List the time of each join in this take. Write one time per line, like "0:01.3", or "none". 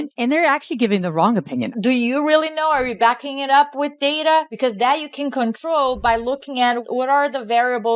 0:01.7
0:04.5
0:06.8